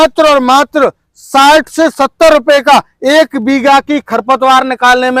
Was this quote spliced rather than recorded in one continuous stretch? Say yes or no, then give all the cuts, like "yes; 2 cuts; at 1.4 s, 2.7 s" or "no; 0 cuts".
no; 0 cuts